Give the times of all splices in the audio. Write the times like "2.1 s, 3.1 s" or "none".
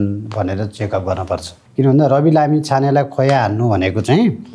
1.6 s